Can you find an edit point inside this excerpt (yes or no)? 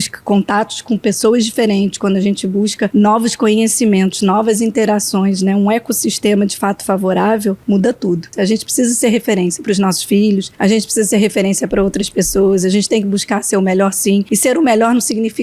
yes